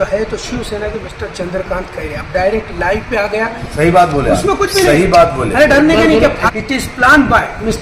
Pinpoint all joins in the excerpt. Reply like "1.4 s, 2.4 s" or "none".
3.7 s, 6.4 s